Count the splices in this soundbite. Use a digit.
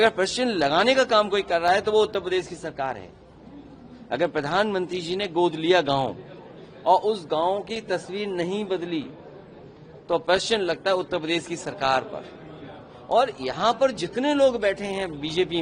0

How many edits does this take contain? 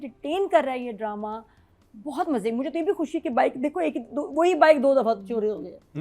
0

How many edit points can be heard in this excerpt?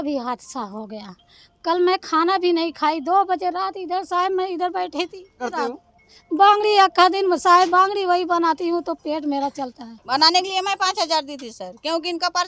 2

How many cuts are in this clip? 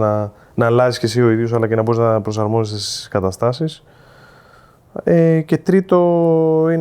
0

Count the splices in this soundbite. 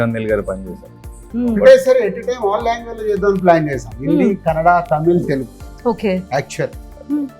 1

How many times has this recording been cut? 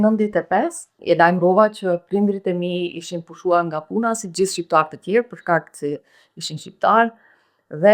1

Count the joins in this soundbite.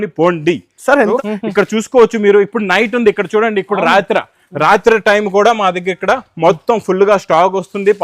1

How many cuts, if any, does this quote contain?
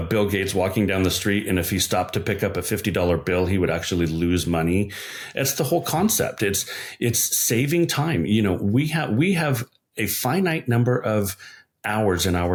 0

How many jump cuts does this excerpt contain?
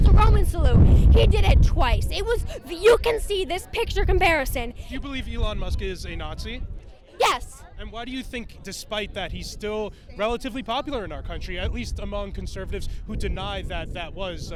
0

